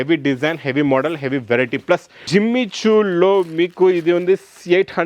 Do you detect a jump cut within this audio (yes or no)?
yes